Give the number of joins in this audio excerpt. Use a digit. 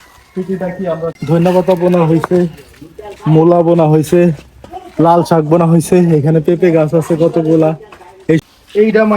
2